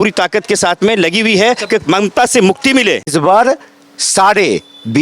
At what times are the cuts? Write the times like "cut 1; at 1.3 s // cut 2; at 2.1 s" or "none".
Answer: cut 1; at 3.1 s